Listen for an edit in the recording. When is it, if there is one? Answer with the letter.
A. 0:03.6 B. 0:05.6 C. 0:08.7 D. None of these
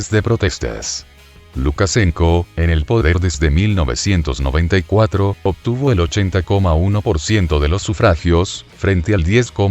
C